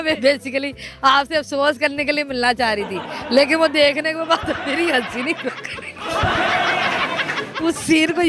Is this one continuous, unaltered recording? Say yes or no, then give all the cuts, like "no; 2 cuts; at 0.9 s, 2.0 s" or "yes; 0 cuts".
yes; 0 cuts